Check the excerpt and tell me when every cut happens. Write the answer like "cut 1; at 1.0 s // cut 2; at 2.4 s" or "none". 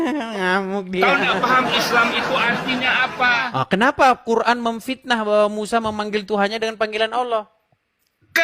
cut 1; at 3.4 s